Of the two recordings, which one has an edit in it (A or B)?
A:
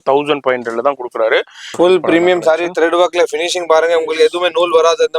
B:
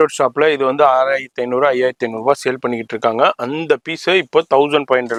A